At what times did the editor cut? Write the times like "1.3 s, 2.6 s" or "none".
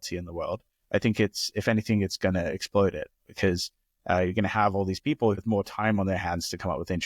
5.4 s